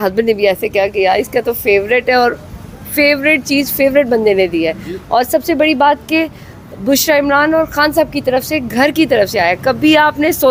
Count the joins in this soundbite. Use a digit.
0